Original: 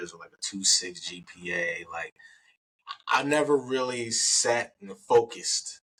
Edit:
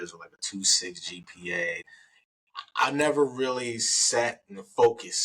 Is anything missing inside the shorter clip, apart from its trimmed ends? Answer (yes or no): yes